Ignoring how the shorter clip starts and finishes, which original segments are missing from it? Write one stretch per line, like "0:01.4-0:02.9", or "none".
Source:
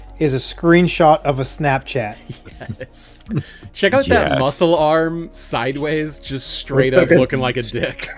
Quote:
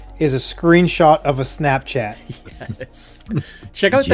none